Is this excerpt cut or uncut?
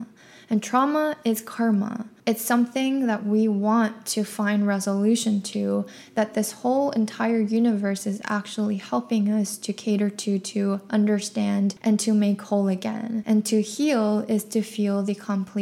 cut